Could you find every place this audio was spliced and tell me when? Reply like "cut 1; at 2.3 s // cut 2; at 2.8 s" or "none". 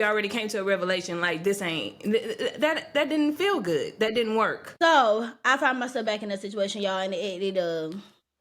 cut 1; at 4.6 s